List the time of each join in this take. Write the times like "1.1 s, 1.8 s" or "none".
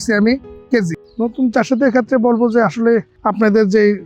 1.0 s, 3.1 s